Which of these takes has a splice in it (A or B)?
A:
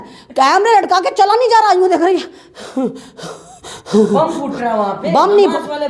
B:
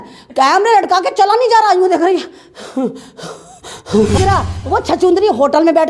B